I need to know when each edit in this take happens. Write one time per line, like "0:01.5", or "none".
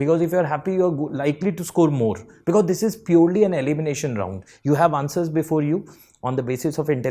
none